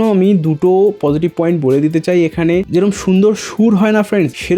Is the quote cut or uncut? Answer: cut